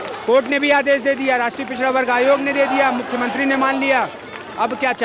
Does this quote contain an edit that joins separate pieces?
no; 0 cuts

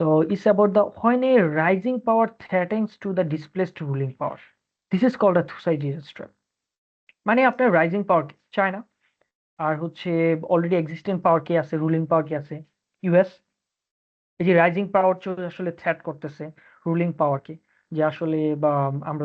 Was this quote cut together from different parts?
no; 0 cuts

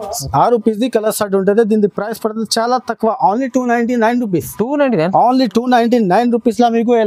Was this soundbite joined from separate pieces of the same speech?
no; 0 cuts

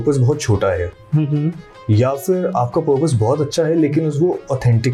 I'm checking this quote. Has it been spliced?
no; 0 cuts

